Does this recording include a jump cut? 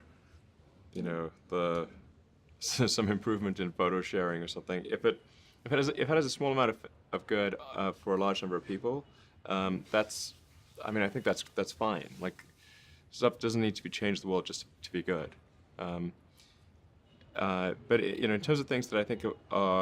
yes; 1 cut; at 3.9 s

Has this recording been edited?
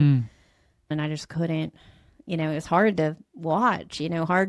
yes; 1 cut; at 0.9 s

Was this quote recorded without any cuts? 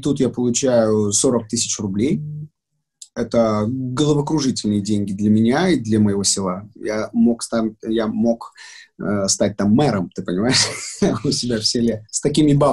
yes; 0 cuts

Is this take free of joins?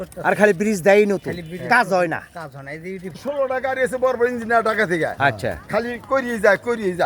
no; 1 cut; at 3.2 s

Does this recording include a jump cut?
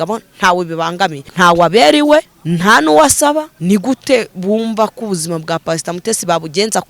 yes; 3 cuts; at 1.3 s, 2.4 s, 3.5 s

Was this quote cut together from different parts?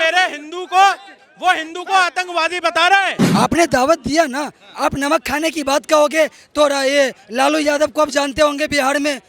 yes; 1 cut; at 3.2 s

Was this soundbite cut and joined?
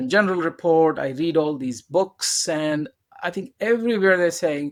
no; 0 cuts

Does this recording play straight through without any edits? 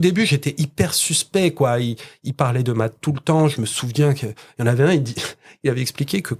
yes; 0 cuts

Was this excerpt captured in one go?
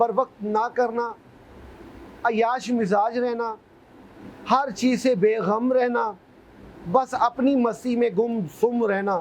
yes; 0 cuts

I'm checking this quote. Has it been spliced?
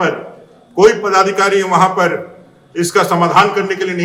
no; 0 cuts

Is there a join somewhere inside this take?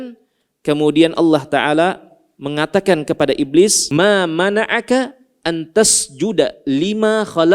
yes; 1 cut; at 3.8 s

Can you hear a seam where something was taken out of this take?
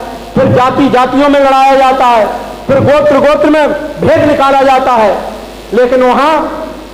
no; 0 cuts

